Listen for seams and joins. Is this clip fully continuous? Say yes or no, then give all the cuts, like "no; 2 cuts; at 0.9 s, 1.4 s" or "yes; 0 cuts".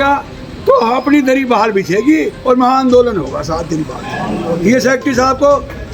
yes; 0 cuts